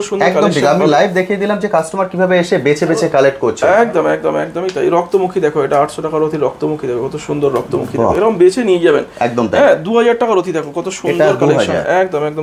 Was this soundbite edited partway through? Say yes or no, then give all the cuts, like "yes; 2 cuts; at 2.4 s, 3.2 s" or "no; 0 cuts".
no; 0 cuts